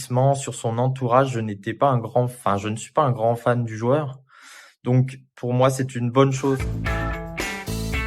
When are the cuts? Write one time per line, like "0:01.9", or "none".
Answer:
0:06.7